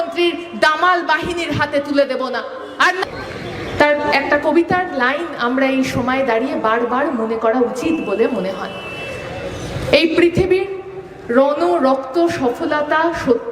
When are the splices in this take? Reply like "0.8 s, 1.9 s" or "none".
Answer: 3.0 s